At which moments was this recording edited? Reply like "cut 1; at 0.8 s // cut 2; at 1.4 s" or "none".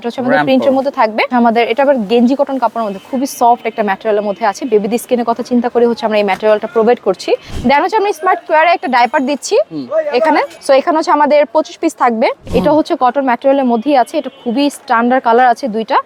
cut 1; at 1.3 s // cut 2; at 7.5 s // cut 3; at 10.5 s // cut 4; at 12.4 s